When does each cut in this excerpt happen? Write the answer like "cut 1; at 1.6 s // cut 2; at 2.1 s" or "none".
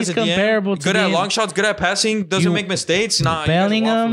none